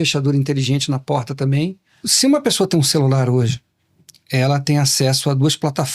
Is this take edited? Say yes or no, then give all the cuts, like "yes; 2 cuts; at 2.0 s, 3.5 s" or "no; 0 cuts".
yes; 1 cut; at 2.0 s